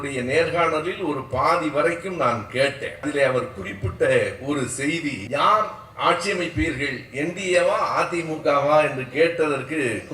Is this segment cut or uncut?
cut